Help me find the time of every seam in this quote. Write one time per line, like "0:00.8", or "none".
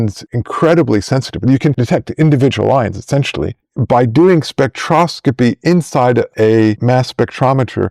0:01.7